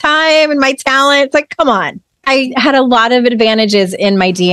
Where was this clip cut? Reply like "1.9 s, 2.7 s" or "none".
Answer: 2.3 s